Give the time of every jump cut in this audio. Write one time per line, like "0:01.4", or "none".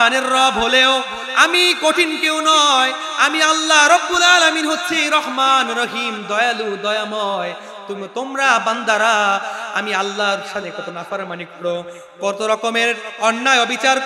none